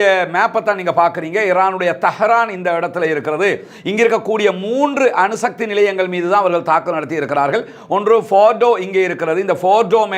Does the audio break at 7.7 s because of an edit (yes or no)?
no